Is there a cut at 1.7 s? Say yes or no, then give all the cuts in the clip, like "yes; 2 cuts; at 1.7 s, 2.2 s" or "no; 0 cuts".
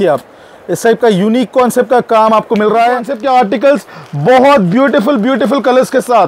no; 1 cut; at 3.1 s